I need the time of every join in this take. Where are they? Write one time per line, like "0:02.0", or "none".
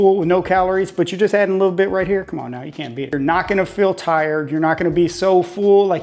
0:03.1